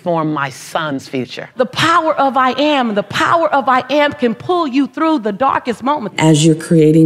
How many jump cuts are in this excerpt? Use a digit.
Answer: 2